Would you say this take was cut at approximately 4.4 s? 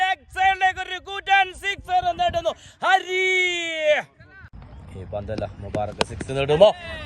yes; 1 cut; at 4.4 s

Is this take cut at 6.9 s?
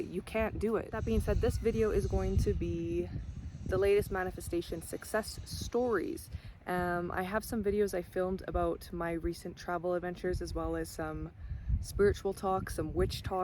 no; 1 cut; at 1.3 s

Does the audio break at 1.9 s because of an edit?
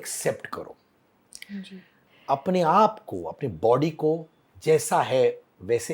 yes; 1 cut; at 1.9 s

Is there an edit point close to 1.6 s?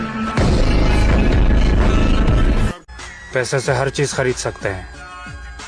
no; 1 cut; at 3.0 s

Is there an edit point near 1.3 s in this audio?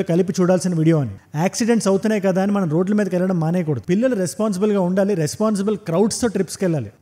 no; 0 cuts

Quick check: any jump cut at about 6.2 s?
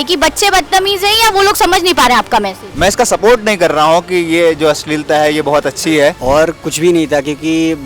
yes; 2 cuts; at 2.6 s, 6.2 s

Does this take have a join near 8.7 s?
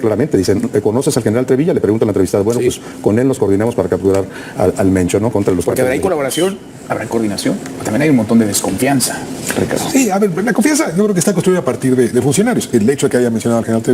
no; 1 cut; at 5.3 s

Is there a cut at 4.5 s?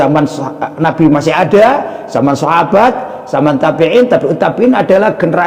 no; 0 cuts

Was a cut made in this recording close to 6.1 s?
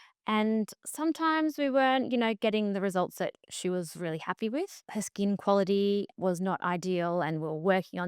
yes; 2 cuts; at 4.8 s, 6.1 s

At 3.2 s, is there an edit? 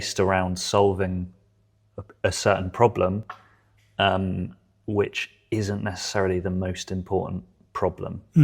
no; 0 cuts

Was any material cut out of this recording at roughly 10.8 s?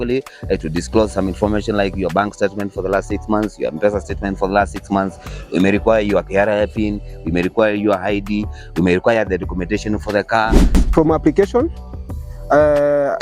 yes; 1 cut; at 10.8 s

